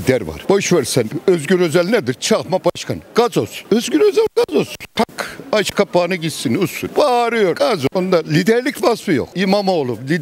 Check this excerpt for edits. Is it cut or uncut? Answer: uncut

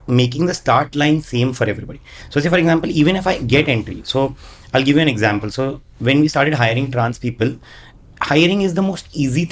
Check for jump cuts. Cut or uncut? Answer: uncut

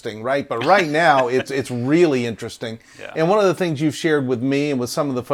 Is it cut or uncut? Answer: uncut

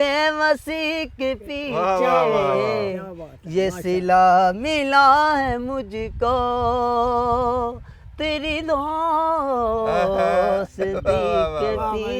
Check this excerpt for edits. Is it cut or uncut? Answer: uncut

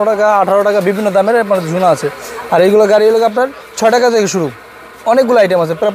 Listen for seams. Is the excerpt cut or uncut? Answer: uncut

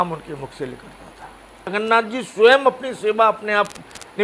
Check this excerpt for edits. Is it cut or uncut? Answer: cut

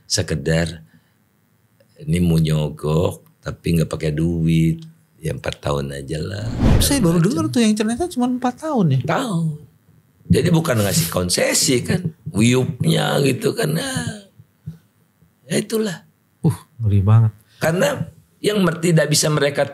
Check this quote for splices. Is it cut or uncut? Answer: cut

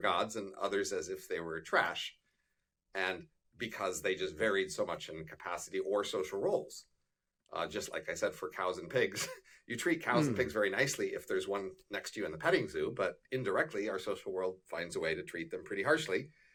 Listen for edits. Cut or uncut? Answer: uncut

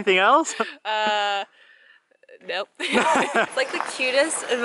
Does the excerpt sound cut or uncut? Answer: cut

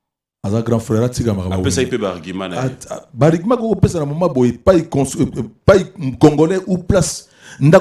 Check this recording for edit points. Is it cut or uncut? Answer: uncut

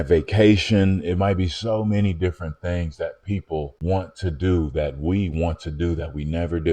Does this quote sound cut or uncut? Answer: uncut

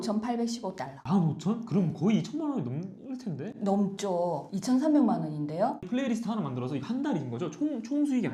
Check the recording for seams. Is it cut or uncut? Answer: uncut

